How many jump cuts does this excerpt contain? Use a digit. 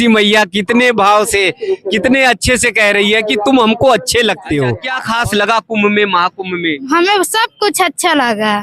1